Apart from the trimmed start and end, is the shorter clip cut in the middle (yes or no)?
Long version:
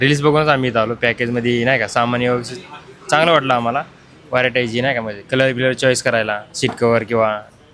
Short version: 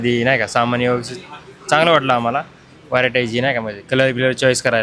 no